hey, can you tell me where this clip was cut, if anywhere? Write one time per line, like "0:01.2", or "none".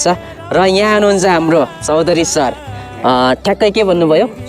none